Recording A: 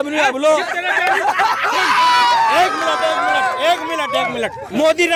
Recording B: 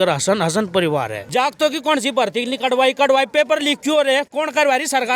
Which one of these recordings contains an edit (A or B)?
B